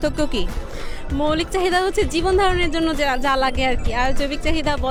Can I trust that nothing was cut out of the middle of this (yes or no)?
yes